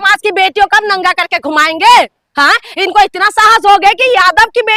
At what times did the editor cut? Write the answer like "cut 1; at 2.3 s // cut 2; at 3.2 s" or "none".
none